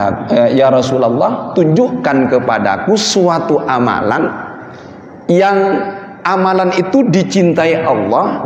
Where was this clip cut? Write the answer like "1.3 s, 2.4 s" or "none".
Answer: none